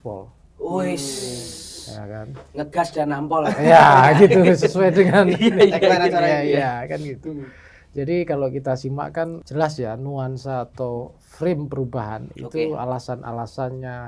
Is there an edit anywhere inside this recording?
yes; 1 cut; at 9.4 s

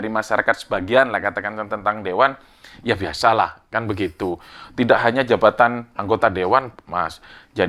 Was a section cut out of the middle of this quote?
no; 0 cuts

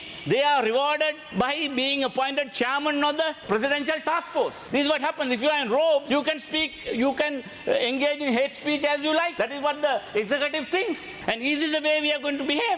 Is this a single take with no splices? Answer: no; 6 cuts; at 1.2 s, 3.4 s, 4.6 s, 6.1 s, 9.3 s, 11.1 s

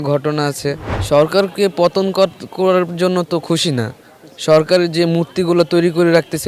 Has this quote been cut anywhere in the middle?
yes; 1 cut; at 0.9 s

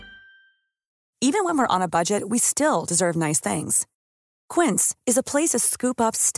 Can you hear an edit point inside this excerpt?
no; 0 cuts

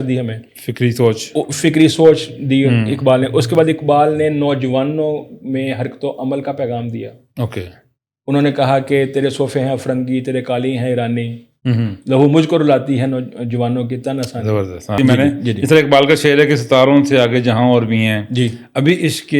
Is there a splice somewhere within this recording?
yes; 1 cut; at 14.9 s

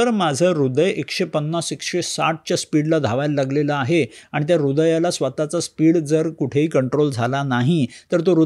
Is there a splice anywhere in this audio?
no; 0 cuts

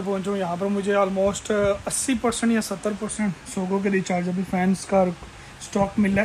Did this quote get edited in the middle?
no; 0 cuts

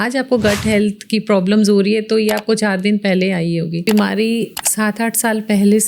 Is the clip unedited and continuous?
no; 2 cuts; at 3.9 s, 4.6 s

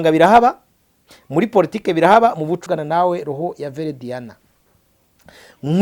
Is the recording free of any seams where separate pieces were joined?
no; 1 cut; at 2.6 s

